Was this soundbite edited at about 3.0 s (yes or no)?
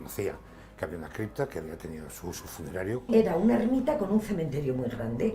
yes